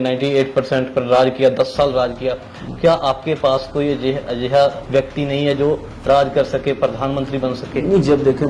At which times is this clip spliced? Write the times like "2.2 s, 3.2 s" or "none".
4.8 s